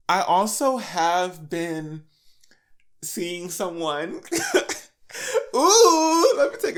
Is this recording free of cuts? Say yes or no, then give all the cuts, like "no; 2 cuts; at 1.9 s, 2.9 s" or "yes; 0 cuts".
yes; 0 cuts